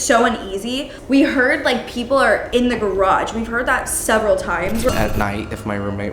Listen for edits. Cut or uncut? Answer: cut